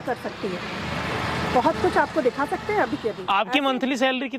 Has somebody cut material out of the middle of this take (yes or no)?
yes